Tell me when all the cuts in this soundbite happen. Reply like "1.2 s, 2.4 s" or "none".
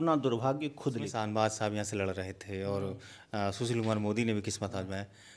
1.1 s